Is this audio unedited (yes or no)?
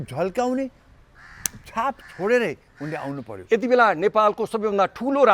no